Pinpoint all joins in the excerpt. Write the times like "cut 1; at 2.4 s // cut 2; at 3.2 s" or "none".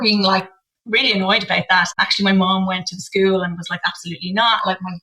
cut 1; at 1.9 s